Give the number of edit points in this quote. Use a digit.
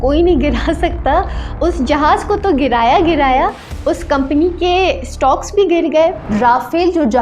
1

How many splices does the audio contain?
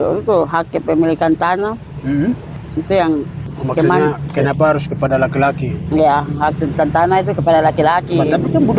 2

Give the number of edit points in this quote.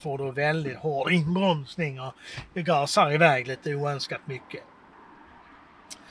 0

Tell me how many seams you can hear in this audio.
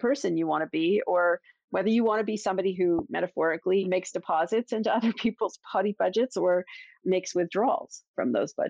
2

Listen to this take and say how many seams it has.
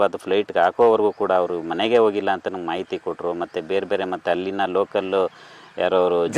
0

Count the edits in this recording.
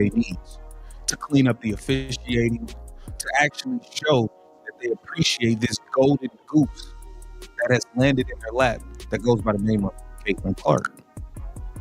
0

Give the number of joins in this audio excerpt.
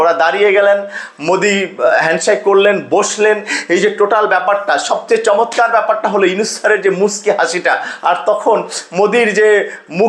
0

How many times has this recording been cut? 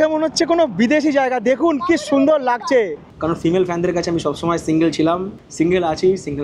2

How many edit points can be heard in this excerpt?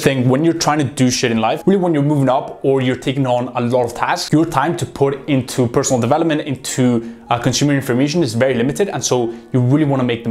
2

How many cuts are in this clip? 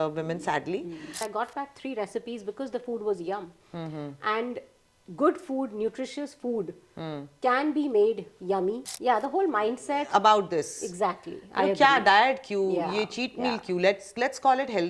2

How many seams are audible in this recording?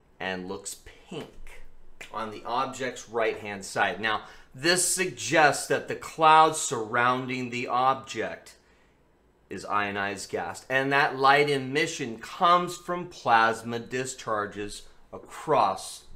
1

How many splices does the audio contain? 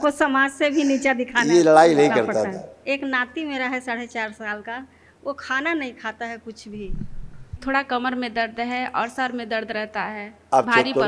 2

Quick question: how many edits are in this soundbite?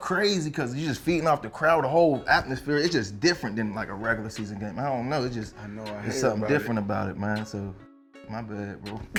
0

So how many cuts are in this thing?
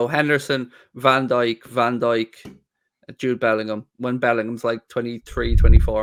0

